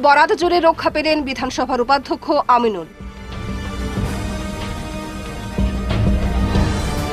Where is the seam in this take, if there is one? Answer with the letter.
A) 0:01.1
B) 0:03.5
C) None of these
C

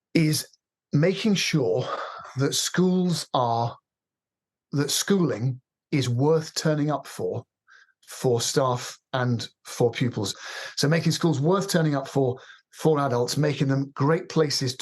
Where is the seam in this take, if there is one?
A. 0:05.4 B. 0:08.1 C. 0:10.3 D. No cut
C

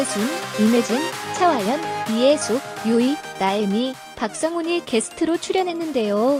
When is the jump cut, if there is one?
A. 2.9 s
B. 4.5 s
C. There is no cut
C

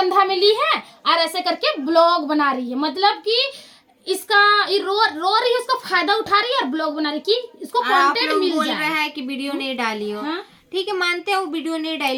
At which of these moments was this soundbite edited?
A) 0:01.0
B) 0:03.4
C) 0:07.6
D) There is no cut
D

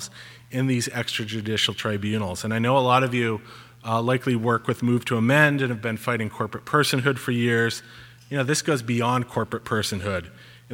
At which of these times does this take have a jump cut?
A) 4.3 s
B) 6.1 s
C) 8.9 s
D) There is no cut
D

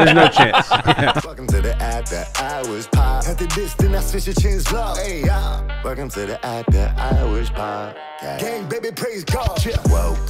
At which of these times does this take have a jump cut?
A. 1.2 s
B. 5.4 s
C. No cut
A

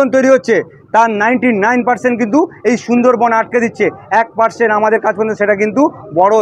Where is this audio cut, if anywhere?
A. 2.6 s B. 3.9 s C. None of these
C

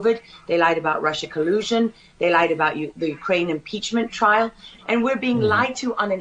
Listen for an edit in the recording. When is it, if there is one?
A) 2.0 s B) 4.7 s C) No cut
B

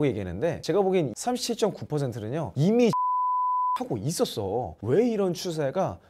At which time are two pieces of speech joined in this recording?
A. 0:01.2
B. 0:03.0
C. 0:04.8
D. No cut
C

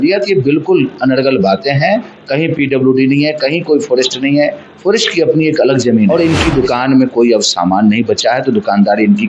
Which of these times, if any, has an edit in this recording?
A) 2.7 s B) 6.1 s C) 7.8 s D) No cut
B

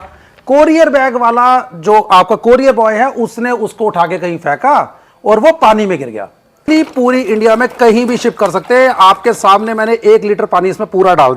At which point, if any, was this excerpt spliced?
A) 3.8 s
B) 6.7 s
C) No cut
B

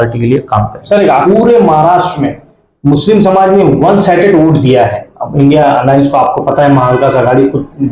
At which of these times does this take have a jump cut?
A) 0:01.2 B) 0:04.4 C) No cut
A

